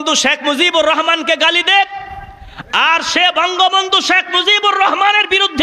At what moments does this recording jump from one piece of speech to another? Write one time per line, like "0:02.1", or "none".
none